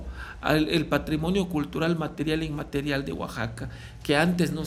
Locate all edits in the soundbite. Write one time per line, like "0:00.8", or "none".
none